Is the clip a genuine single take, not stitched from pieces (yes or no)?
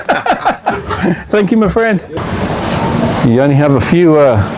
no